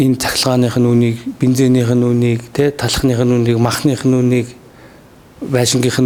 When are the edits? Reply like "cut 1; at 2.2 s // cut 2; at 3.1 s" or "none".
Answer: none